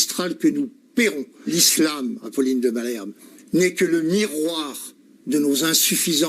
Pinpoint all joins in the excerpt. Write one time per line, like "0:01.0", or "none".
0:01.5